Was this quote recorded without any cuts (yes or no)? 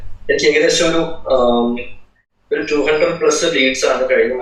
yes